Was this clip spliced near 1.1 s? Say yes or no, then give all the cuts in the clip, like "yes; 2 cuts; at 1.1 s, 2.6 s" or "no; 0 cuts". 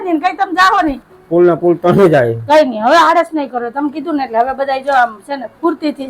yes; 1 cut; at 1.1 s